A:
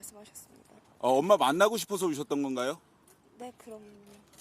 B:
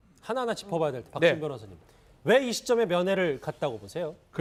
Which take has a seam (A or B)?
A